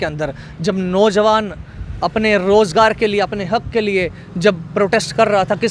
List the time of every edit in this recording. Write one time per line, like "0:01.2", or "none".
none